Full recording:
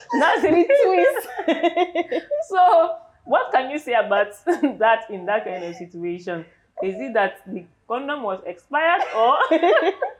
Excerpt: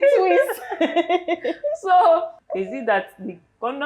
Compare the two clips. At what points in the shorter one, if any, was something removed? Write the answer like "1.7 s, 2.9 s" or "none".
2.4 s